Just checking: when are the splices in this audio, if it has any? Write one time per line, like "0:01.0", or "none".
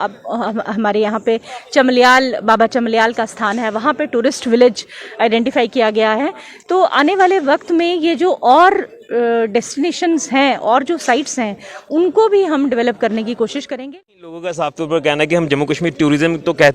0:13.7